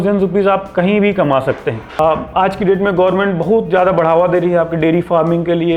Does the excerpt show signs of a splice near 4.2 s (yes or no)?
no